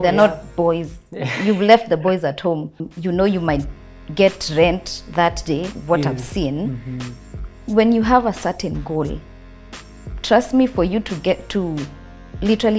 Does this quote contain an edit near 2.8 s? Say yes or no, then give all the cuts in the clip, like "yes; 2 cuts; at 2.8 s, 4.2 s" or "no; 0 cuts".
yes; 2 cuts; at 2.8 s, 5.7 s